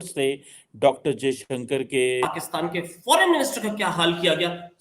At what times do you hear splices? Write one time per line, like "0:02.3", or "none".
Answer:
0:02.2